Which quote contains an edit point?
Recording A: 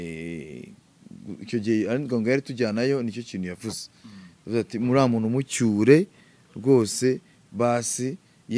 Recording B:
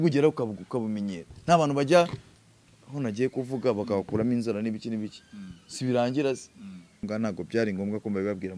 B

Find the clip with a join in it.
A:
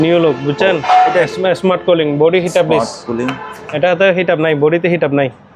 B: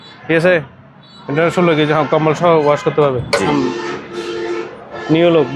B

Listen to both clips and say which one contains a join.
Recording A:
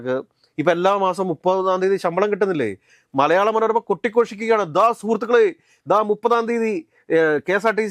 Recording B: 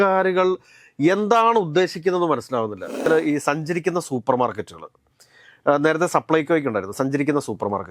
B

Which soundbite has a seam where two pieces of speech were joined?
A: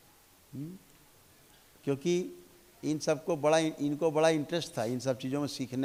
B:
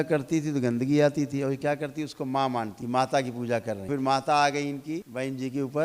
B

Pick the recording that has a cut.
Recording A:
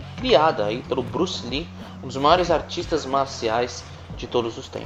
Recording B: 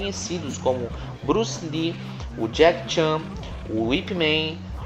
B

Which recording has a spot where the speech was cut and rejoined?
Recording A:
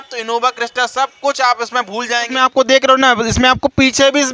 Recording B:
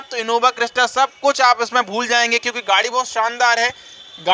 A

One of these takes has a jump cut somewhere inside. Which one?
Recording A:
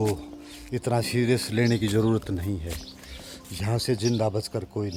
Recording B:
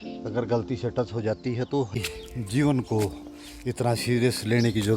B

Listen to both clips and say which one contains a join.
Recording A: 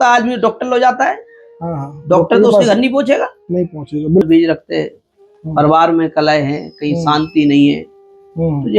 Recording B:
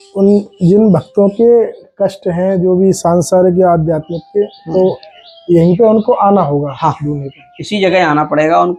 A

